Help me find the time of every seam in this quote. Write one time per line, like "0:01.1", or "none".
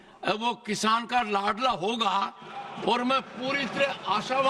none